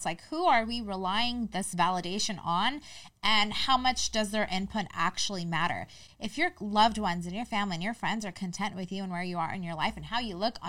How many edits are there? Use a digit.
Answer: 0